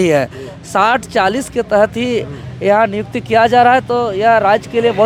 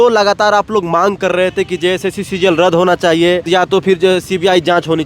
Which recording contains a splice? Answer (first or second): second